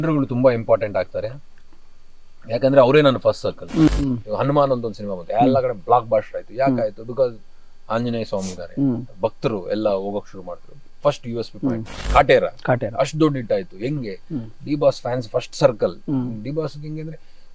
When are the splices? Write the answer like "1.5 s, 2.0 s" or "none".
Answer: 3.9 s, 11.9 s